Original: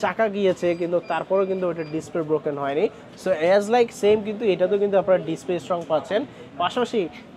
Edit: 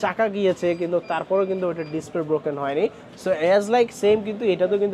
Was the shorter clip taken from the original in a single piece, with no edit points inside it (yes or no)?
yes